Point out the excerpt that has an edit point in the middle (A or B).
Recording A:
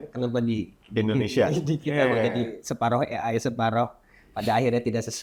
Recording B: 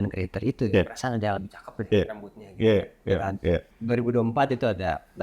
B